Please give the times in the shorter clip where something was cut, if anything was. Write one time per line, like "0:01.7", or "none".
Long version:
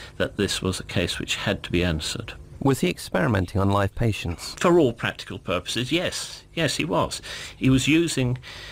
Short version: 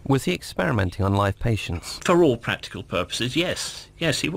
none